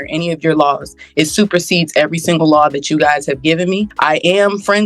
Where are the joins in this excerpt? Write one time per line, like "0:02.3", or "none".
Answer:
0:03.9